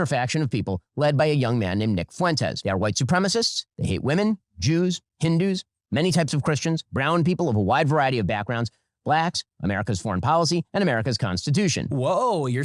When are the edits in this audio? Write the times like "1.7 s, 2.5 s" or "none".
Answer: 2.6 s, 11.8 s